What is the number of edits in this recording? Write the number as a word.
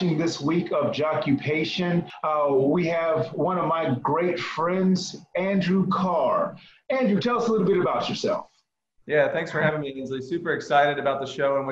one